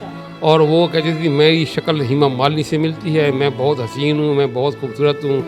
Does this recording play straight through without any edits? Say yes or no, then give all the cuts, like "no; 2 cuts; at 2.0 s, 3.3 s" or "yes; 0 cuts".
yes; 0 cuts